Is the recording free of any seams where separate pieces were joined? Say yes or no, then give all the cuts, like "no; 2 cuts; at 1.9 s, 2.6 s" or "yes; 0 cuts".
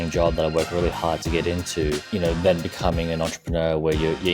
no; 1 cut; at 2.0 s